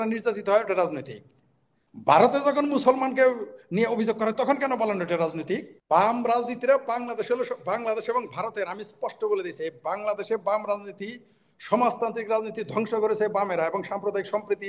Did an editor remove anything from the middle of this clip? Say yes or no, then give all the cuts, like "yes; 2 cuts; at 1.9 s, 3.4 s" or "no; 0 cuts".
yes; 1 cut; at 5.7 s